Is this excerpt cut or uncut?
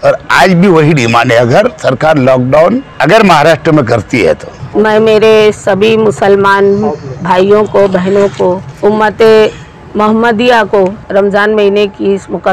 cut